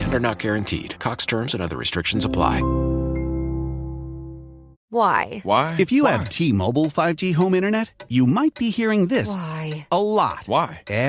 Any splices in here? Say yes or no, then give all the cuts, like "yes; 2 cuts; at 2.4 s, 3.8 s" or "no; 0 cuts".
yes; 1 cut; at 4.9 s